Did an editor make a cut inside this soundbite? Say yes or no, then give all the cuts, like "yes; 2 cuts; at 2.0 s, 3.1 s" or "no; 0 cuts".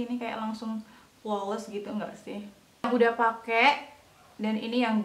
yes; 1 cut; at 2.9 s